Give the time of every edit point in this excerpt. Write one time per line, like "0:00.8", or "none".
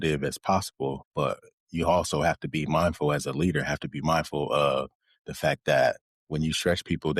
0:01.0
0:06.1